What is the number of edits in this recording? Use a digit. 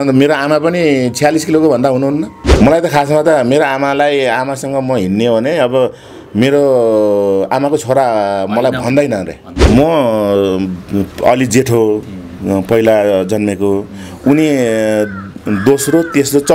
2